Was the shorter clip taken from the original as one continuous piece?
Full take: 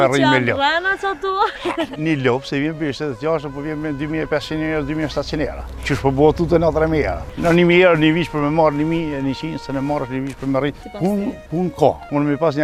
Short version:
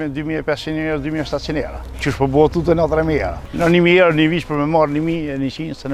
yes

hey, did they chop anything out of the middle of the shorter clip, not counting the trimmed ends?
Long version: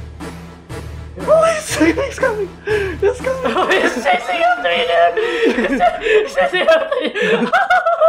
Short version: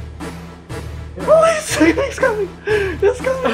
no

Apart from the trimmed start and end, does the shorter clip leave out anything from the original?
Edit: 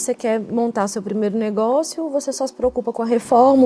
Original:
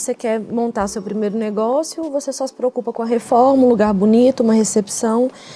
no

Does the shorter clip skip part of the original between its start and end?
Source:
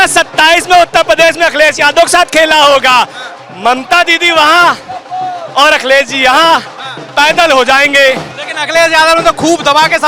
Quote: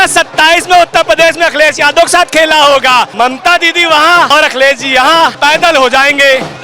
yes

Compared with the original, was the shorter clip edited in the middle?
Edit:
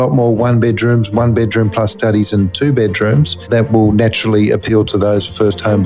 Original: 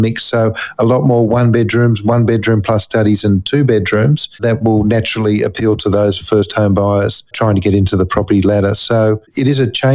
no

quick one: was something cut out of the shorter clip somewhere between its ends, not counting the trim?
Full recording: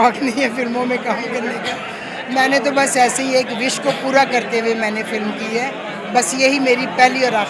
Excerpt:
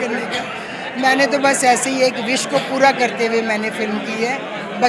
no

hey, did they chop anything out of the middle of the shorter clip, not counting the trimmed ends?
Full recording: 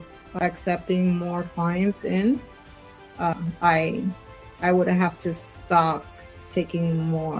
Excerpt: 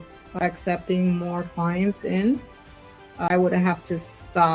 yes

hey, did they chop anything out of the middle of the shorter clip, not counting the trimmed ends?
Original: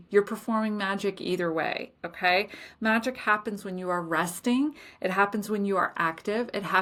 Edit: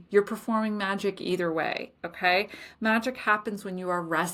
no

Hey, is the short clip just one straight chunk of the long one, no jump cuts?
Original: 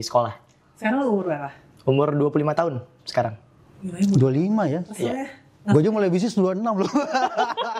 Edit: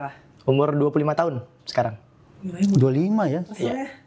yes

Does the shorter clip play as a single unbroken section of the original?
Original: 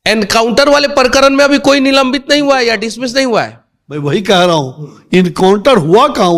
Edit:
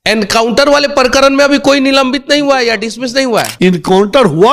no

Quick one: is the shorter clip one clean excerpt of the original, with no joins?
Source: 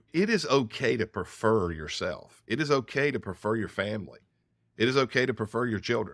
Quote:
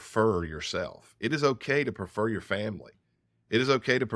yes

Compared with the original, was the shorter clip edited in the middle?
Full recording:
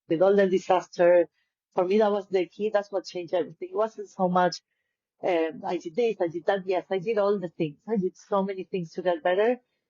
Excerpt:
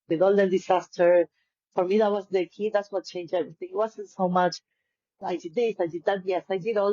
yes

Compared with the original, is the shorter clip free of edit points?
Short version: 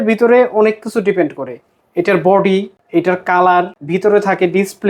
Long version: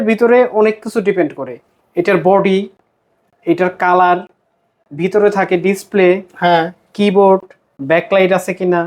no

